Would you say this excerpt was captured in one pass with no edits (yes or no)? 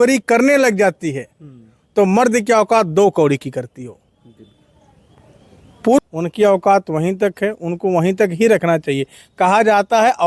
no